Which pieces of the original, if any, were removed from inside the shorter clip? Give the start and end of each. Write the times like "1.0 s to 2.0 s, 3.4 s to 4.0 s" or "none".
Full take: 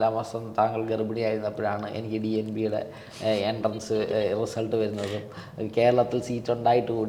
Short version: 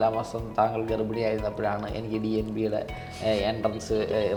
none